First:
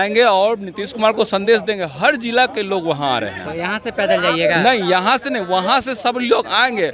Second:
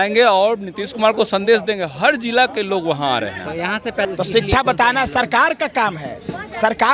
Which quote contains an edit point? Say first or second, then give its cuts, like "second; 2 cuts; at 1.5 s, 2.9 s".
second; 1 cut; at 4.1 s